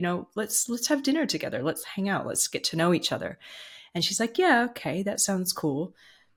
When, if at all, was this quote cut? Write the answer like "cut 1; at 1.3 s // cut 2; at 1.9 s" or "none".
none